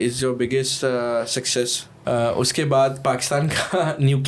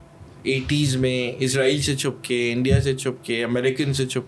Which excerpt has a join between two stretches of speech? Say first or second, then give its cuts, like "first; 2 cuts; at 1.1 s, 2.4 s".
first; 1 cut; at 1.9 s